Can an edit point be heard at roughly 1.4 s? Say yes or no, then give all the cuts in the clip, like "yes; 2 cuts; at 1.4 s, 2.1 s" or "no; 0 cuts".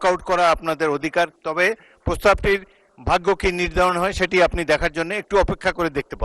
yes; 1 cut; at 1.4 s